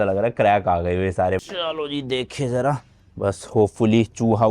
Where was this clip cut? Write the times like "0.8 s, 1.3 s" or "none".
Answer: 1.4 s